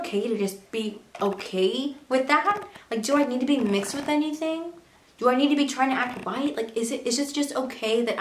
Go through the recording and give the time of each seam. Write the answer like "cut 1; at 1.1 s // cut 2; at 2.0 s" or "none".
none